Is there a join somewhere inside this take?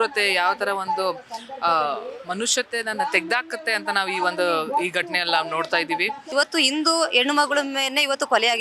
yes; 1 cut; at 6.2 s

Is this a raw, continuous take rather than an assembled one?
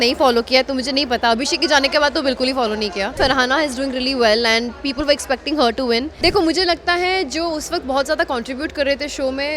no; 2 cuts; at 3.1 s, 6.1 s

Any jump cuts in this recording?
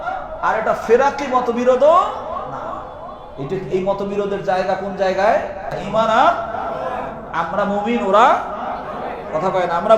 yes; 1 cut; at 5.8 s

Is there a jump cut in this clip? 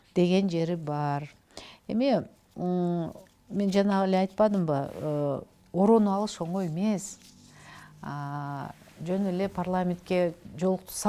no; 0 cuts

